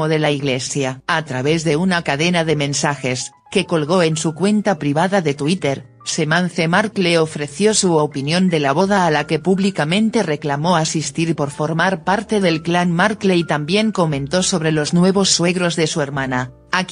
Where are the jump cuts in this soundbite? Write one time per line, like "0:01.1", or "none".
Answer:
0:15.4